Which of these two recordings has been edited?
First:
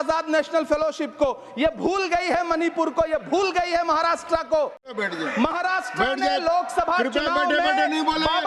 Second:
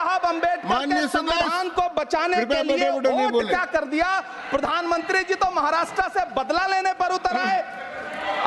first; 1 cut; at 5.0 s

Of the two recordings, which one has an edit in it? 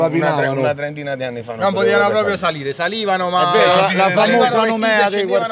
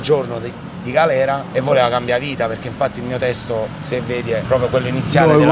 second; 2 cuts; at 1.4 s, 4.4 s

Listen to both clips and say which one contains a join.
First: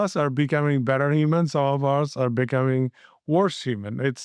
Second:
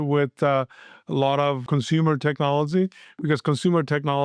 second; 1 cut; at 1.6 s

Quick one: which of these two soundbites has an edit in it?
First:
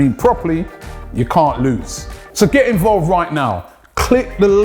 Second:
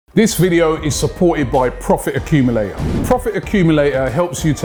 first; 1 cut; at 2.0 s

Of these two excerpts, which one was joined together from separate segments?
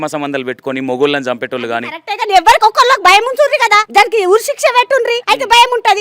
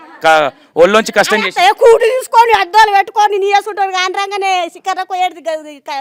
first; 2 cuts; at 3.8 s, 5.2 s

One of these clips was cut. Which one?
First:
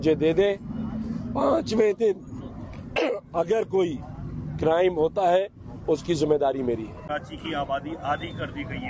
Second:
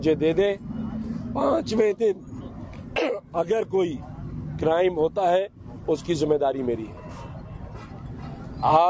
first; 1 cut; at 7.0 s

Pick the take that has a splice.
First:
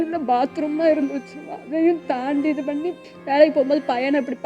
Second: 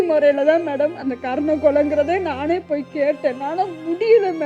first; 1 cut; at 3.0 s

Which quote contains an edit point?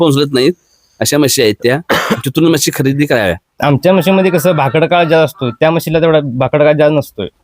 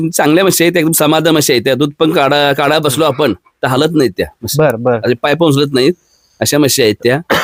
first; 1 cut; at 3.5 s

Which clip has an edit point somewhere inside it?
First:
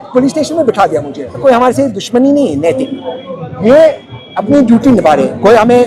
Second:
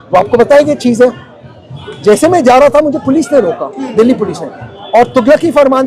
first; 1 cut; at 1.4 s

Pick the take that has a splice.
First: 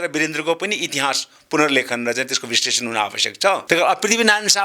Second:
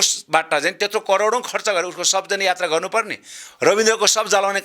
first; 1 cut; at 3.6 s

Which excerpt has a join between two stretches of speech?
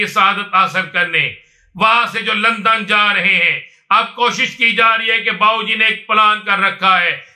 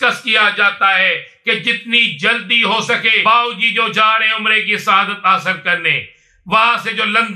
second; 1 cut; at 3.1 s

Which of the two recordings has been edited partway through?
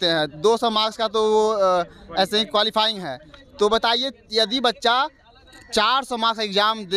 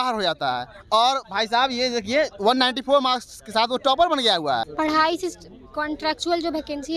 second; 1 cut; at 4.7 s

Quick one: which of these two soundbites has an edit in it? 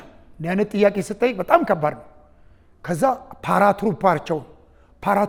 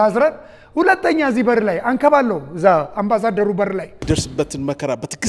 second; 1 cut; at 4.0 s

